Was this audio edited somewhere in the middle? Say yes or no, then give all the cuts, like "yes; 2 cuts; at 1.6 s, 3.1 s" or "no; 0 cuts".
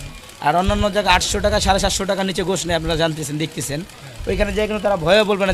no; 0 cuts